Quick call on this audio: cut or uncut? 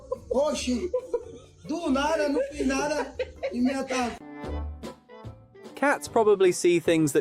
cut